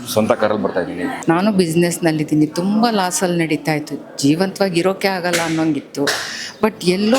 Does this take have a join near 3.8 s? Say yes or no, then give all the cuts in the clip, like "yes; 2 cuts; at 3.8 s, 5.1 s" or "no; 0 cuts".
no; 1 cut; at 1.1 s